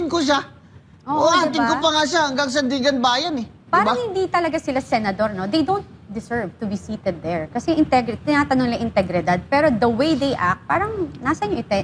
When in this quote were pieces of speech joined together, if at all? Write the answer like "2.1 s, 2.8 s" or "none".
none